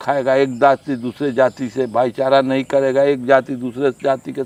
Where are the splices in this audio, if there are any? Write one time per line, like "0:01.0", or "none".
none